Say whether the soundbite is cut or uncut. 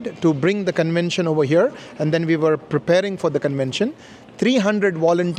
uncut